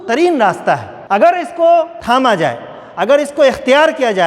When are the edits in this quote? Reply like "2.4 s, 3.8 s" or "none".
0.9 s, 2.0 s